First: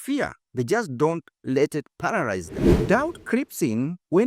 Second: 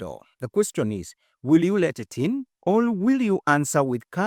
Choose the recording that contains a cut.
first; 1 cut; at 2.8 s

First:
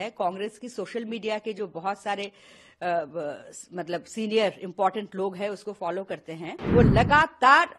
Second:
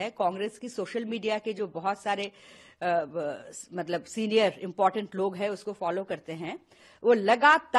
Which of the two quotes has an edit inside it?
first; 1 cut; at 6.5 s

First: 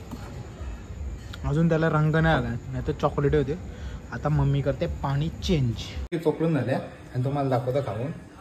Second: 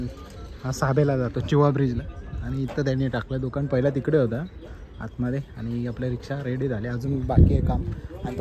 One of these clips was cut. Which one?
first; 1 cut; at 5.9 s

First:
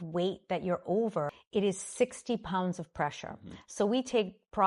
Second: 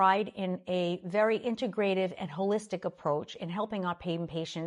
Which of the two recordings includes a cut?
first; 1 cut; at 1.4 s

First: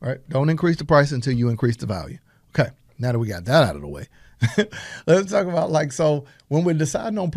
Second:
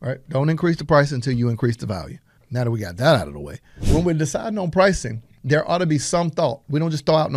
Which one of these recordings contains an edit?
second; 2 cuts; at 2.4 s, 3.7 s

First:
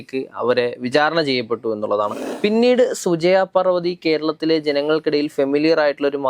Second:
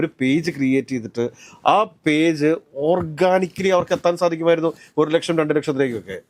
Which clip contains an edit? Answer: first; 1 cut; at 2.2 s

